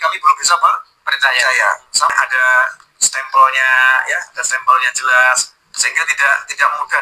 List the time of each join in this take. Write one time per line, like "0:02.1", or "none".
0:02.1